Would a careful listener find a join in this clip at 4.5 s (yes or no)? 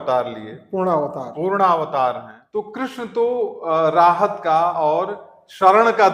no